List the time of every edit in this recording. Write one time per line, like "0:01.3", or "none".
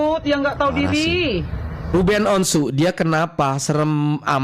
0:01.9